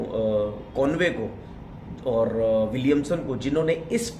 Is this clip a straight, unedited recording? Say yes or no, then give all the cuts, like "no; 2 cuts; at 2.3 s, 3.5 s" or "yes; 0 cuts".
yes; 0 cuts